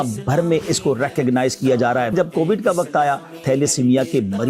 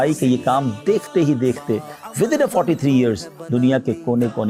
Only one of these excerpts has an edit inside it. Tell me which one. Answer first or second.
first